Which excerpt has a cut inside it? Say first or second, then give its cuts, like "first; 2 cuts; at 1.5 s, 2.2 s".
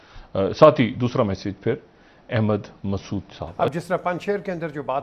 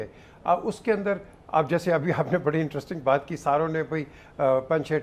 first; 1 cut; at 3.6 s